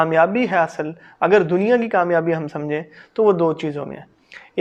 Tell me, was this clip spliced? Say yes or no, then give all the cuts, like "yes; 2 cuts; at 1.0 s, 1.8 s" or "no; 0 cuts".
no; 0 cuts